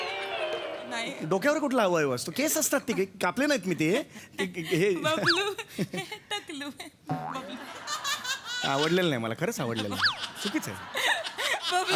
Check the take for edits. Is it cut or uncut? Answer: uncut